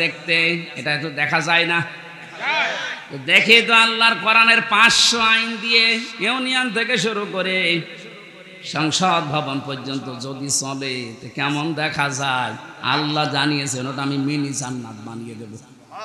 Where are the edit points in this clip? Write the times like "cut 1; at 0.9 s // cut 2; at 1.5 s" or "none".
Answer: none